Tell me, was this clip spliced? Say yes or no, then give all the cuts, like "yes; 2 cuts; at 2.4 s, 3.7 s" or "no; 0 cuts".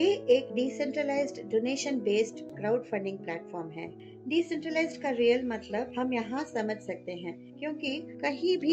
yes; 1 cut; at 2.5 s